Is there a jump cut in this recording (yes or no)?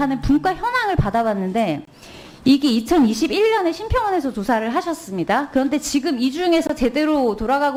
no